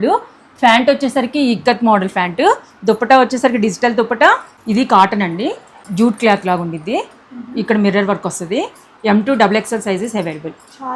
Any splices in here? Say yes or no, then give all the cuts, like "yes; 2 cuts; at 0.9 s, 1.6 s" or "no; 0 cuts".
yes; 3 cuts; at 4.5 s, 5.8 s, 8.9 s